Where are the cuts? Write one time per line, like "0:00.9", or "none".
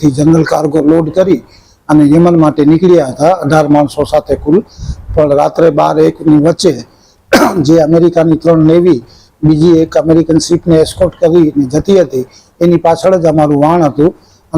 none